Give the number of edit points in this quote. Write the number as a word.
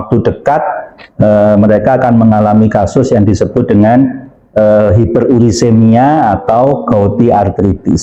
zero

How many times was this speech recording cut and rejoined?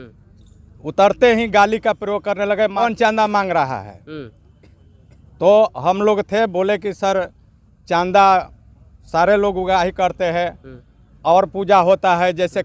zero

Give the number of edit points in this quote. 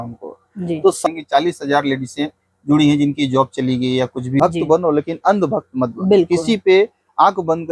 two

